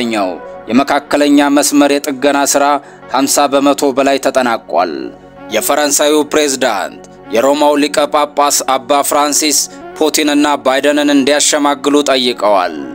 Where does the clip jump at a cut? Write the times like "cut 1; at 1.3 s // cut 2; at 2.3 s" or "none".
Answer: cut 1; at 5.3 s